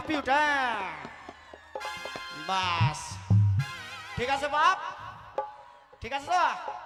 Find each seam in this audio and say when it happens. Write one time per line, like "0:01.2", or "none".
none